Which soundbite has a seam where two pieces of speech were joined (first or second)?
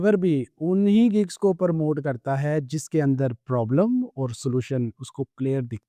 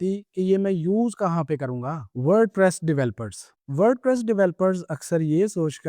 second